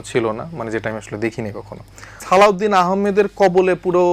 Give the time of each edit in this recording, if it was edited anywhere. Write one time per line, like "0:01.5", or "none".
0:02.2